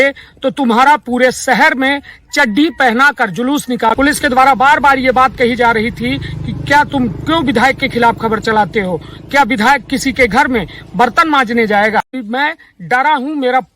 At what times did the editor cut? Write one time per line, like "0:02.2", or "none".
0:03.9
0:12.1